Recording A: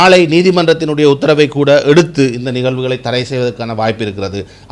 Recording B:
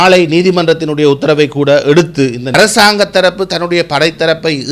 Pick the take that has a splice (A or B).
B